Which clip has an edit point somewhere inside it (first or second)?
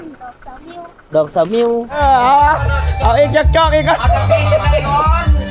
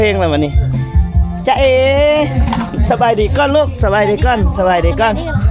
first